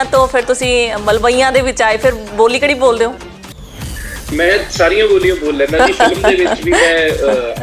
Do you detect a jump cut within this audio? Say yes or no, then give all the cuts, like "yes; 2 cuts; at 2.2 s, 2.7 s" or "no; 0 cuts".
no; 0 cuts